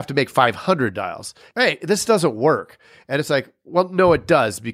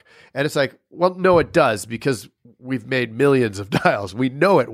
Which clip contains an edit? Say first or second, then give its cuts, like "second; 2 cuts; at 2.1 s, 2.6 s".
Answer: first; 1 cut; at 1.5 s